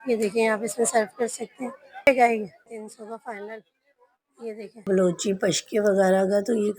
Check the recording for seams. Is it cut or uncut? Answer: cut